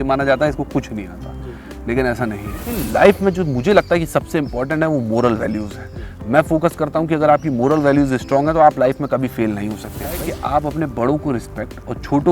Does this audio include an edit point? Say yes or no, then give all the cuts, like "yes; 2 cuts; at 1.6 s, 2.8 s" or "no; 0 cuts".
yes; 2 cuts; at 2.8 s, 10.2 s